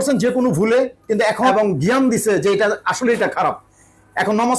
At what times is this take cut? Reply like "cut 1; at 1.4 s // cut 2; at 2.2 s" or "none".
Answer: cut 1; at 1.5 s